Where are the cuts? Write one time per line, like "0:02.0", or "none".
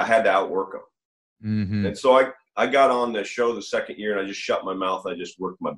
none